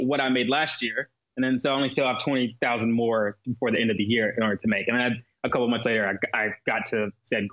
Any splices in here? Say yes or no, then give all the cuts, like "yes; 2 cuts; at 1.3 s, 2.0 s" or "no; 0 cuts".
no; 0 cuts